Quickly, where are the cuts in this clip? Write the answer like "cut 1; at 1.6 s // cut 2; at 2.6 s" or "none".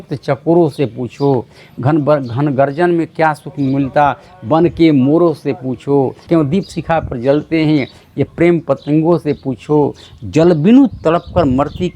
cut 1; at 6.2 s